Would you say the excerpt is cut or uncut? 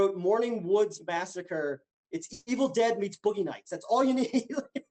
cut